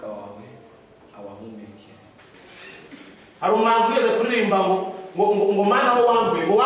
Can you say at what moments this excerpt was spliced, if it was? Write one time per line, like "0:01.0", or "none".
0:02.3

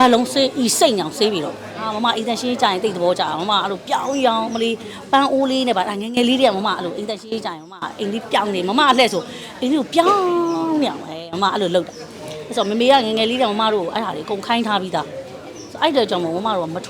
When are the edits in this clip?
0:01.9

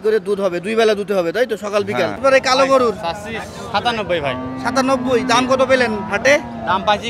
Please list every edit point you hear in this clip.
0:02.2

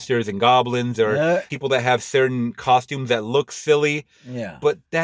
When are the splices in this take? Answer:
0:01.5

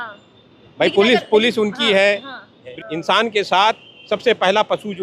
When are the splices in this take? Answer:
0:02.7

